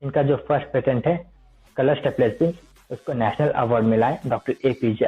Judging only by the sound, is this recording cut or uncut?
uncut